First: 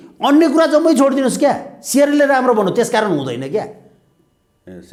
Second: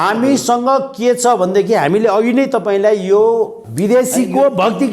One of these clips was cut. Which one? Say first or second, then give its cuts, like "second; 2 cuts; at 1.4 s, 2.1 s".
second; 1 cut; at 3.6 s